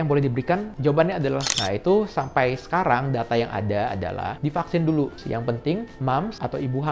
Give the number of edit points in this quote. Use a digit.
2